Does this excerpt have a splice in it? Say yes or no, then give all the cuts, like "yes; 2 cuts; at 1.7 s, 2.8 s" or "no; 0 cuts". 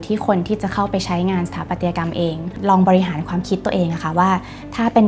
yes; 1 cut; at 2.5 s